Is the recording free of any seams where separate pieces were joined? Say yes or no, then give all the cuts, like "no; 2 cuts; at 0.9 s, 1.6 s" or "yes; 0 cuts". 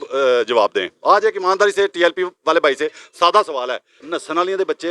no; 1 cut; at 3.9 s